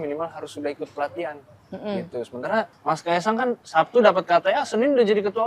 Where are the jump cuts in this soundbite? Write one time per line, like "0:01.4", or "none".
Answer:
0:02.7